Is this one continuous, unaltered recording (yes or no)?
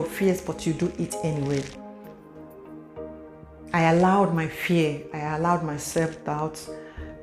yes